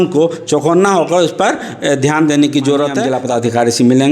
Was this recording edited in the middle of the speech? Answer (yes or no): yes